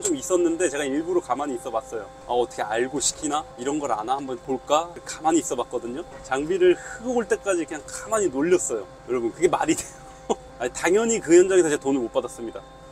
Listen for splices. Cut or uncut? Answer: cut